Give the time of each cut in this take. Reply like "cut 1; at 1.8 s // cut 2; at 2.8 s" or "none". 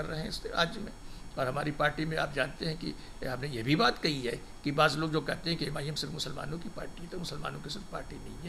none